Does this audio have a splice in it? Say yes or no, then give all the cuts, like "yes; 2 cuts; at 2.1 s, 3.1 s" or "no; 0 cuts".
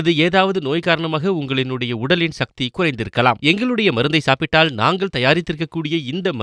no; 0 cuts